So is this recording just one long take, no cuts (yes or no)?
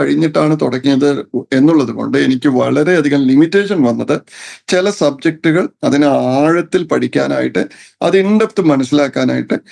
yes